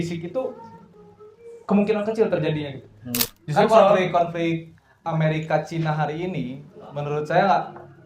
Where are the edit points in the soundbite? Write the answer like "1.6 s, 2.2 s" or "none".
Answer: 3.3 s